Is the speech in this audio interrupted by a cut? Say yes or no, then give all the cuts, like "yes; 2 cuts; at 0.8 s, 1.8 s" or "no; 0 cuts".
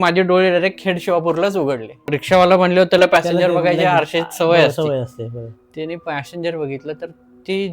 yes; 1 cut; at 2.2 s